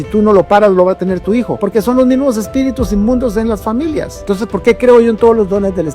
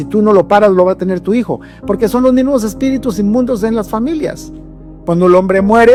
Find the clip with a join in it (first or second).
first